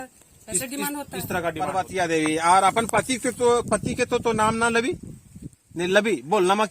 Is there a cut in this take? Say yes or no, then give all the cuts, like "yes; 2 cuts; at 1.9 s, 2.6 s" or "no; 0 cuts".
yes; 1 cut; at 1.7 s